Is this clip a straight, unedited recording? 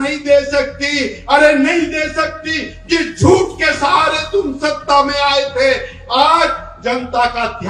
yes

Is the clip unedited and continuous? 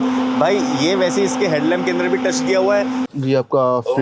no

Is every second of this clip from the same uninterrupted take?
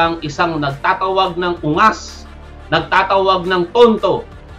yes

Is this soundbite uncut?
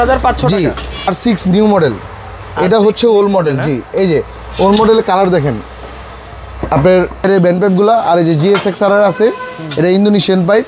no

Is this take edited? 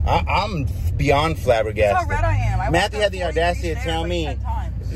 no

